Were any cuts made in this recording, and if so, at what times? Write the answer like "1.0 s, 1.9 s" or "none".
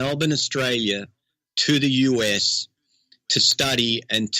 none

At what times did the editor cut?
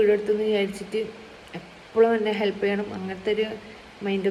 none

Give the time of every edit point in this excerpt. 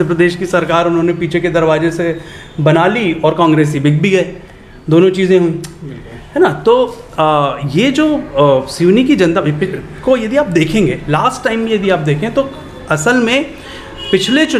none

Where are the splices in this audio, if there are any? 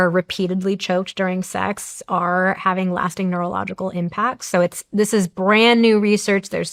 none

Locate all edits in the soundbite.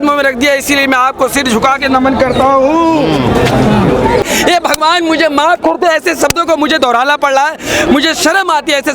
4.2 s

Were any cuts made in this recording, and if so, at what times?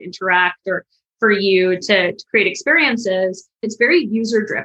3.7 s

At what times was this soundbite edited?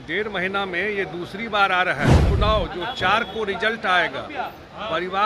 2.2 s

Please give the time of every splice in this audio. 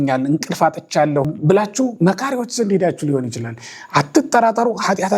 1.3 s

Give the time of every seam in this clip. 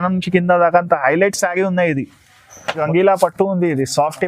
2.8 s

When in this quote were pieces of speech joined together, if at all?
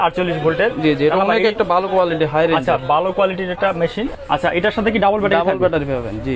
4.1 s

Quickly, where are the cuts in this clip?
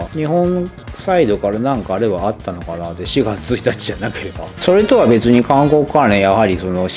none

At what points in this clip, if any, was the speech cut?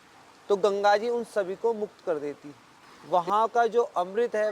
2.9 s

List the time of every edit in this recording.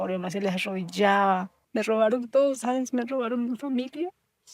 1.6 s

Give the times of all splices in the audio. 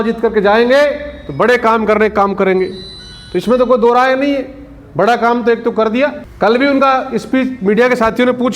6.2 s

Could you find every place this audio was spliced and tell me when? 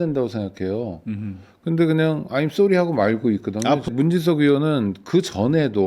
3.9 s

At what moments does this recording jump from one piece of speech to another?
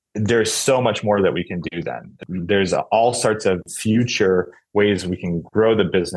2.1 s, 3.7 s

